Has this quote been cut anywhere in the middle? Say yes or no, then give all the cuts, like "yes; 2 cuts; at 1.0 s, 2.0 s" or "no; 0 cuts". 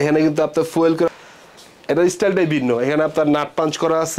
yes; 1 cut; at 1.1 s